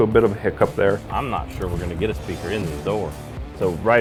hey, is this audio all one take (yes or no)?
yes